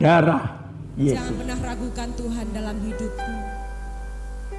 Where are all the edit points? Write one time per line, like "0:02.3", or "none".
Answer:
0:01.3